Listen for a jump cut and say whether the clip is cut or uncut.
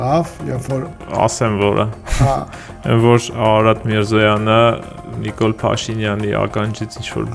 uncut